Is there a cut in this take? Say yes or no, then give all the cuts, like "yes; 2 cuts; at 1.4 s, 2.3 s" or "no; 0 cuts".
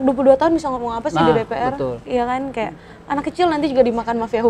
no; 0 cuts